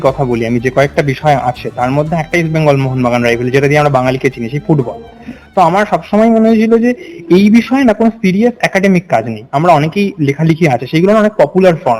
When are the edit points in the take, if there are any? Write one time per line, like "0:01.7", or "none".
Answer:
none